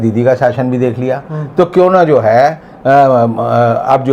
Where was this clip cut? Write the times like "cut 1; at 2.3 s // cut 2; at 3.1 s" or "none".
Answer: none